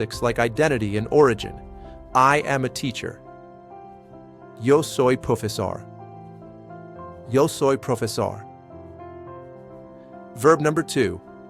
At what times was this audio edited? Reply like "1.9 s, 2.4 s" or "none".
3.2 s, 4.6 s, 5.8 s, 7.3 s